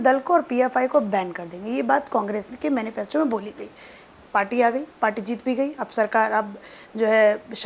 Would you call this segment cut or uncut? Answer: uncut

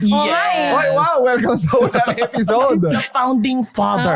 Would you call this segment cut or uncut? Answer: cut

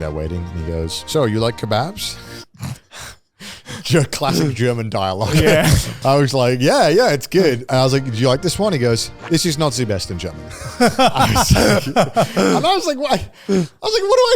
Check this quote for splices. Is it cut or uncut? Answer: cut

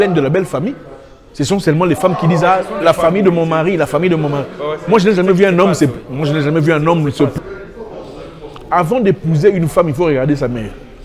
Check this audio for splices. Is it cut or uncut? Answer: cut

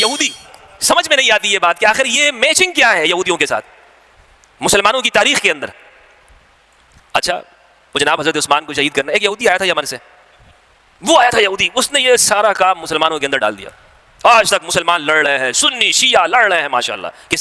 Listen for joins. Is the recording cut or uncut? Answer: uncut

